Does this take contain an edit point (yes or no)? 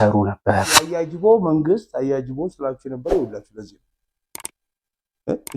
yes